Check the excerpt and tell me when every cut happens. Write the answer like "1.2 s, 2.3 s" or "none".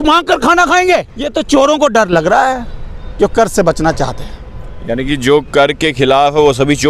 1.2 s